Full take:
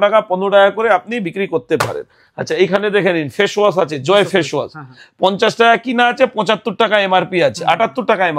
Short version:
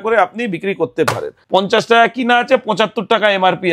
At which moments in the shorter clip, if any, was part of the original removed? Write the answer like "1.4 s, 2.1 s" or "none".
1.3 s